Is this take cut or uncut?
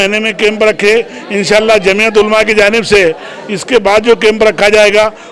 uncut